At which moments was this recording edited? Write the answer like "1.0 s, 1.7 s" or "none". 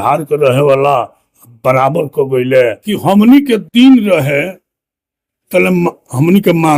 2.9 s